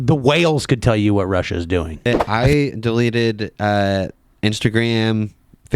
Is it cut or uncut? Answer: cut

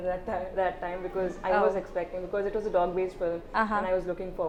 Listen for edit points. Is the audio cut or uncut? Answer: uncut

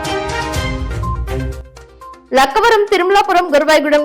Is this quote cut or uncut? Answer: cut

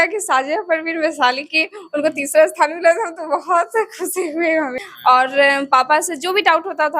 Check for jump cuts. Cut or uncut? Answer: cut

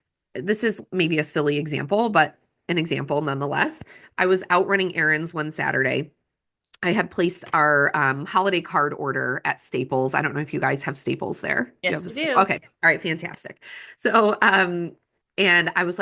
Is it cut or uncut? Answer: uncut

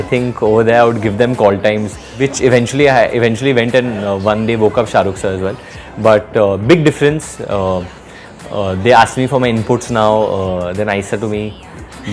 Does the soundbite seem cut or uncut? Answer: cut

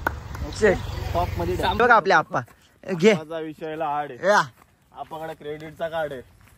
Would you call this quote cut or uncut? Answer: cut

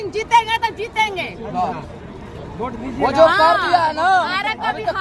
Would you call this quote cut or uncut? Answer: uncut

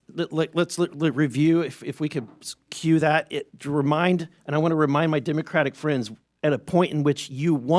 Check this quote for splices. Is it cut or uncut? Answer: uncut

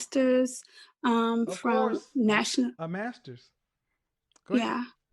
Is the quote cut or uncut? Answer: uncut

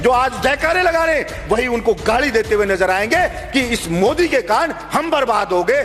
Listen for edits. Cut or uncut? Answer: uncut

